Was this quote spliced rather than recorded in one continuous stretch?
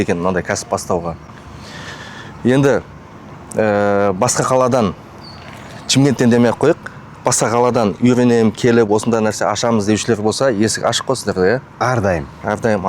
no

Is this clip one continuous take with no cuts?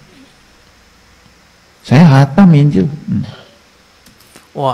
yes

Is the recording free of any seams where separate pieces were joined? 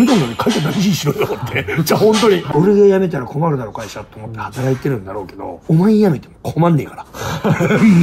no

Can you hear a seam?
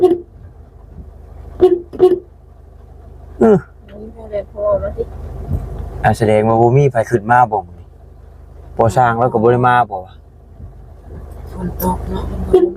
no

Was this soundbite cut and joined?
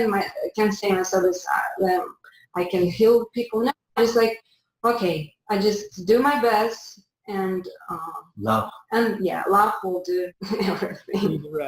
yes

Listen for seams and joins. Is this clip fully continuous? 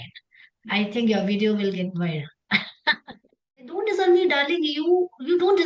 no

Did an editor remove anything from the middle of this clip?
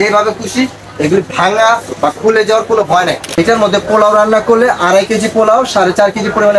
yes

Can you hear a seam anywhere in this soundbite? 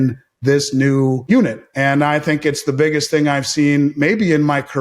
yes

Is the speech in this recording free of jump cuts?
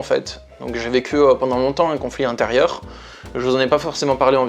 yes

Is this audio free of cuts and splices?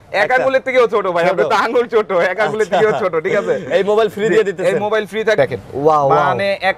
no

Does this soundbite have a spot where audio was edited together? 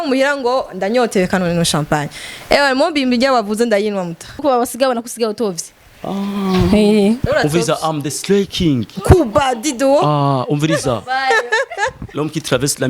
yes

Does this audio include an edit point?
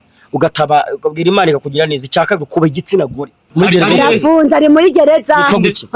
yes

